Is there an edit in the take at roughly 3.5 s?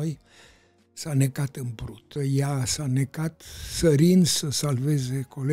no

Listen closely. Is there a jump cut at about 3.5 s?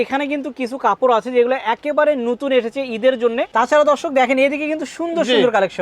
yes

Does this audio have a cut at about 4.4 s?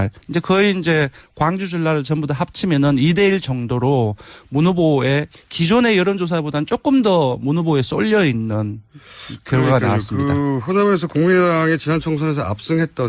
yes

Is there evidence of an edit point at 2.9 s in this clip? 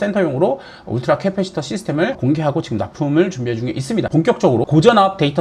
no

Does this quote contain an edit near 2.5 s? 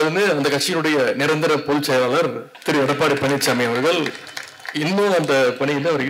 yes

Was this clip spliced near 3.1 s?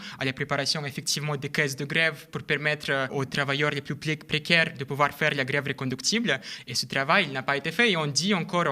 yes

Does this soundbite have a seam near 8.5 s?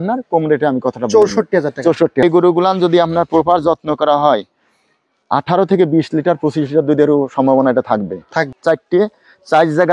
yes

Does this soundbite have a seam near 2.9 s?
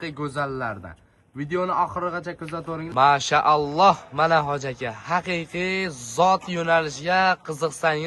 yes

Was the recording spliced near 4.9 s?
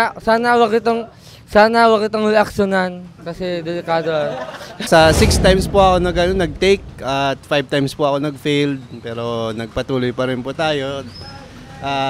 yes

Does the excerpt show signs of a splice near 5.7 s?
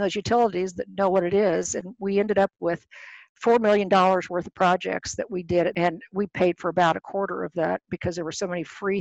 yes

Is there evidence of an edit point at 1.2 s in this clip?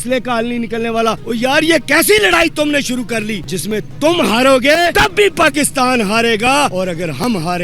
yes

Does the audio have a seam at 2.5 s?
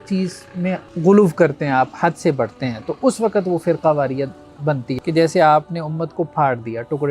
no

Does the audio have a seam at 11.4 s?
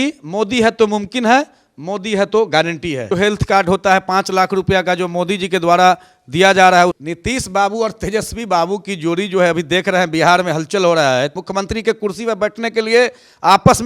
yes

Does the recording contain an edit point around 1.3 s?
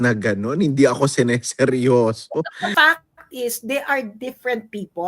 no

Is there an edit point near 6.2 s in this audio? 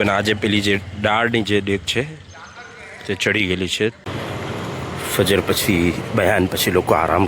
no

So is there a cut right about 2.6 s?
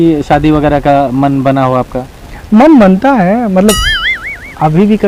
no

